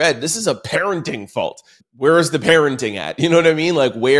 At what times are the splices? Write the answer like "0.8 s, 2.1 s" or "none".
1.8 s